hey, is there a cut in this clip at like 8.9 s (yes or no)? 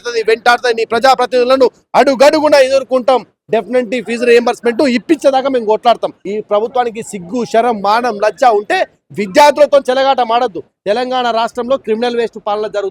no